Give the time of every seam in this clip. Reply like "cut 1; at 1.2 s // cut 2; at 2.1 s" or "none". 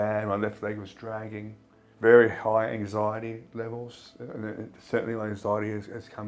cut 1; at 1.8 s